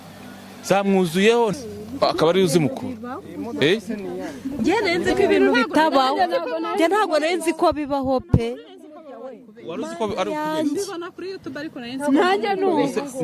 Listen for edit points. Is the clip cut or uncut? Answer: cut